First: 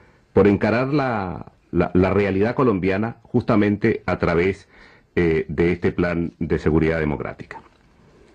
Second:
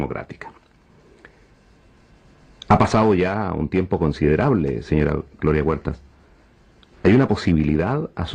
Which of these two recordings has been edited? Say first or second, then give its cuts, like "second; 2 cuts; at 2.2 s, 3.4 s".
first; 1 cut; at 5.2 s